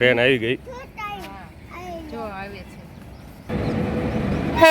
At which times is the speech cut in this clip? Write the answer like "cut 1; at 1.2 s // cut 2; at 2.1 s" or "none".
cut 1; at 3.5 s